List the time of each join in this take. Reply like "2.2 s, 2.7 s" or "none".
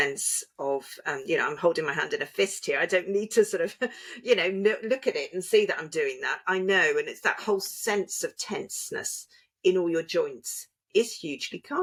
none